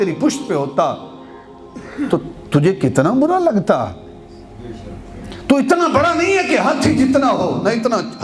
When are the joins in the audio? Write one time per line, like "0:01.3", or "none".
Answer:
none